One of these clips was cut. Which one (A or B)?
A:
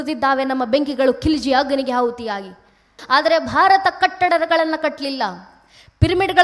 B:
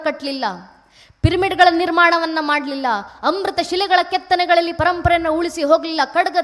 A